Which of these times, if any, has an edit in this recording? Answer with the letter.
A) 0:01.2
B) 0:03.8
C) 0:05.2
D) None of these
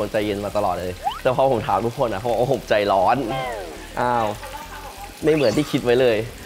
D